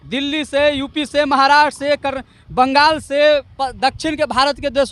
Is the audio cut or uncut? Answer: uncut